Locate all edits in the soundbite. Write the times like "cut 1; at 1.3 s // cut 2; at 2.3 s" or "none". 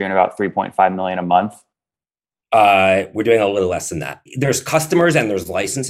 cut 1; at 4.2 s